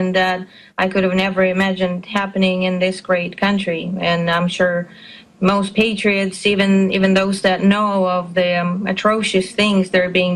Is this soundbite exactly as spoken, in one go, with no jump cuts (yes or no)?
yes